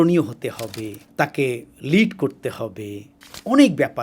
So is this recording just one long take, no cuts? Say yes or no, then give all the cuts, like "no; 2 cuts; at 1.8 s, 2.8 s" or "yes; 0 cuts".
no; 1 cut; at 1.0 s